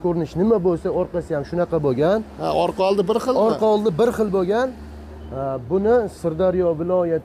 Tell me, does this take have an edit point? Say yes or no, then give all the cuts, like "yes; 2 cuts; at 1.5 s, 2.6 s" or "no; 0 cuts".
no; 0 cuts